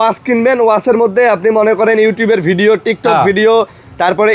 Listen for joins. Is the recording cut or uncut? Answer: uncut